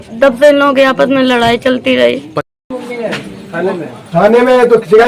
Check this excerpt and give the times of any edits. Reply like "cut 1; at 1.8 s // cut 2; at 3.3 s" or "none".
cut 1; at 2.3 s